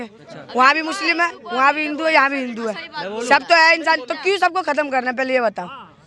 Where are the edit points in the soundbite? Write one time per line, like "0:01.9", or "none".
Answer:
none